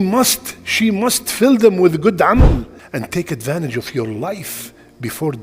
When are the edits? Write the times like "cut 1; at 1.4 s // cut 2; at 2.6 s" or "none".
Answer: cut 1; at 2.4 s